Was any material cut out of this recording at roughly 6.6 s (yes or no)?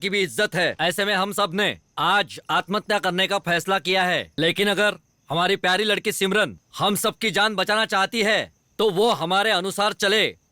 yes